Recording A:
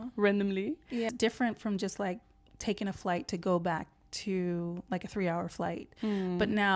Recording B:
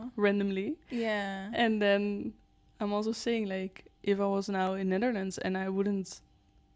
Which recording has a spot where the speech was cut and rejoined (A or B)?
A